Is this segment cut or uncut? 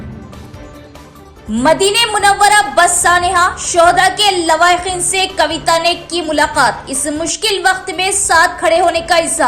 cut